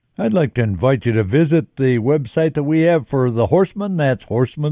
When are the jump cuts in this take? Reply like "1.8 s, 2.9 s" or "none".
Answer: none